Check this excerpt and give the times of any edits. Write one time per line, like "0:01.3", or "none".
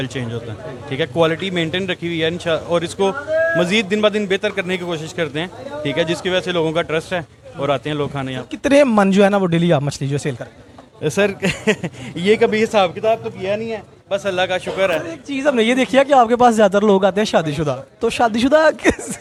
none